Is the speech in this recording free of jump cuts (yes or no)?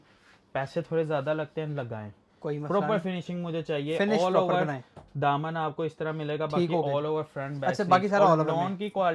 yes